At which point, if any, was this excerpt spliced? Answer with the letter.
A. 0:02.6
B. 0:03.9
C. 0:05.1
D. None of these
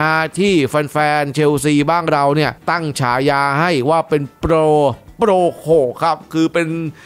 C